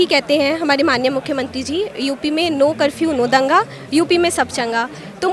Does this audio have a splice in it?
no; 0 cuts

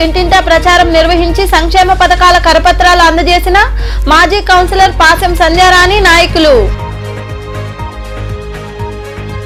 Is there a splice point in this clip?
no; 0 cuts

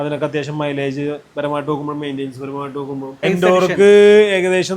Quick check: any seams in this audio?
yes; 1 cut; at 3.3 s

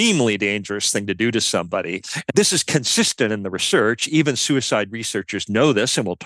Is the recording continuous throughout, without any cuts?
no; 1 cut; at 2.1 s

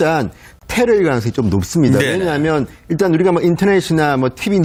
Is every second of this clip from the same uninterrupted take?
yes; 0 cuts

